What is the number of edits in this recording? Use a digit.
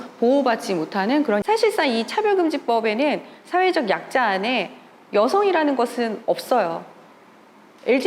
1